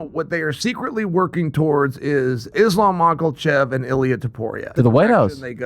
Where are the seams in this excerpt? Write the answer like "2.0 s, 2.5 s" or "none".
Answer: 2.5 s, 4.7 s